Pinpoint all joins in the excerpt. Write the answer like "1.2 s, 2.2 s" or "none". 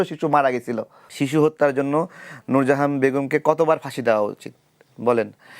1.0 s